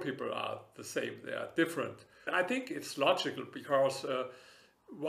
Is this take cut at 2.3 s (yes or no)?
yes